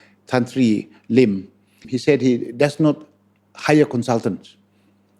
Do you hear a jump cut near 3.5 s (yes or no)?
no